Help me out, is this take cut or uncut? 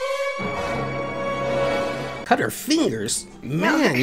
cut